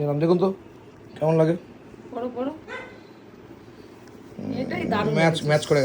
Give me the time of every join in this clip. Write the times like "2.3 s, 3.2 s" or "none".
none